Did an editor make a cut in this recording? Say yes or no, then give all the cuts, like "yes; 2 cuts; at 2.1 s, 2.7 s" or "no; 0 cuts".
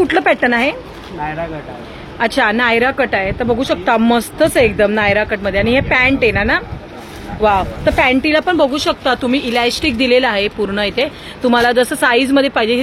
no; 0 cuts